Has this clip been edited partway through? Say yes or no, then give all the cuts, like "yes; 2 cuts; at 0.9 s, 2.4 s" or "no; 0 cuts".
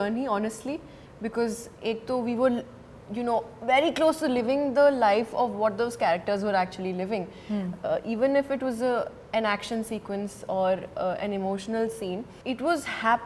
no; 0 cuts